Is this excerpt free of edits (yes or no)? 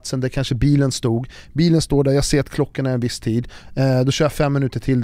no